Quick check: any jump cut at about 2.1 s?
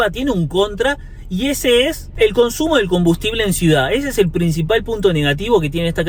no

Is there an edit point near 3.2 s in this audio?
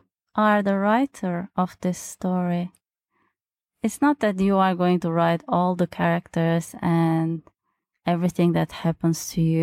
no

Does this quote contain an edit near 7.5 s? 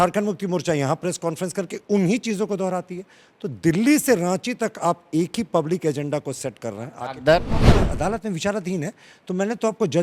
yes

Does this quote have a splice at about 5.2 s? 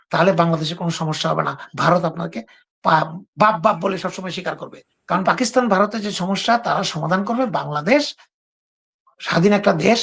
yes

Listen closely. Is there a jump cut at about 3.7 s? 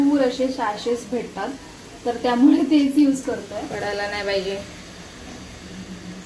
yes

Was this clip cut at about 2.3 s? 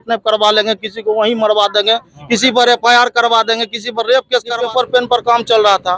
no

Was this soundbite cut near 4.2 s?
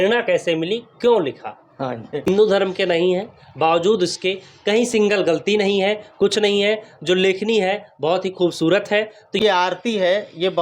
no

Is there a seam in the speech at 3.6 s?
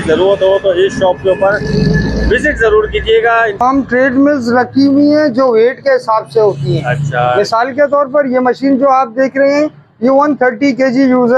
yes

